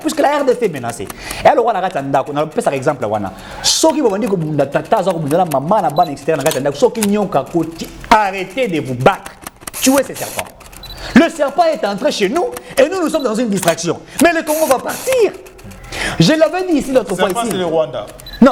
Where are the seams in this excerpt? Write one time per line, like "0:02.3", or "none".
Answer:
none